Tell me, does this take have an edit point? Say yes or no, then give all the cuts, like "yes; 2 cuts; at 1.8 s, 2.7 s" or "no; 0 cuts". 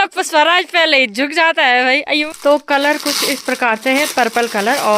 yes; 1 cut; at 2.3 s